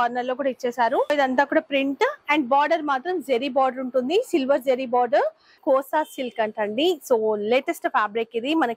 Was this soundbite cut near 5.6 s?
yes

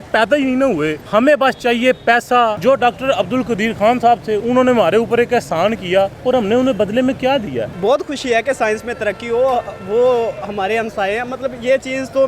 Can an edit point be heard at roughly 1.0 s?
yes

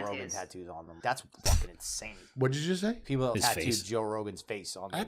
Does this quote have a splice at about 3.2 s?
yes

